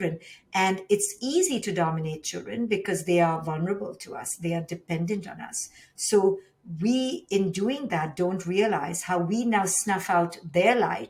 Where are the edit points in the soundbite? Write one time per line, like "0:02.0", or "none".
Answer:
none